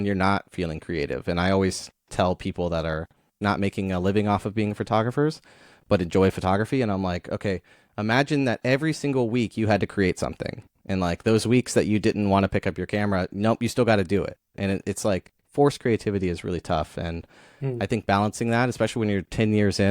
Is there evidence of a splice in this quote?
yes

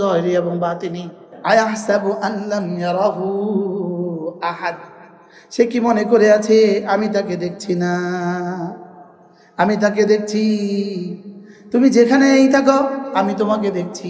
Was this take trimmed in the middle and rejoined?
yes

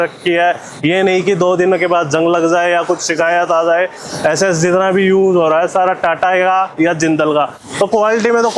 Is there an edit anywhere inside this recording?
yes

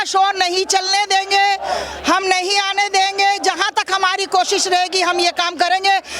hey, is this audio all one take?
yes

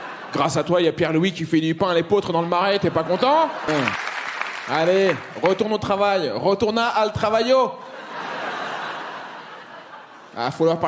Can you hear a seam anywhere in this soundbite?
no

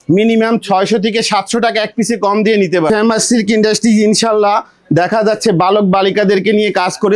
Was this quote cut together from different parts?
yes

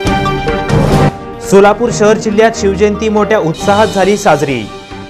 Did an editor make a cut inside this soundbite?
no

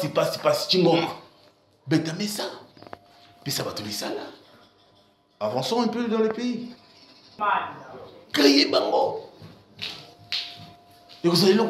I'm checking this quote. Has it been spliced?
yes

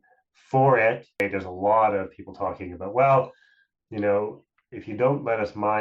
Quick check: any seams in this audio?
yes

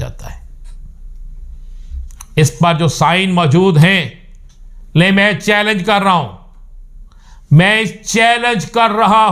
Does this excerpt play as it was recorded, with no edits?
yes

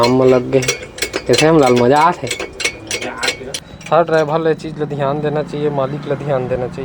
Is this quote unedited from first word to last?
no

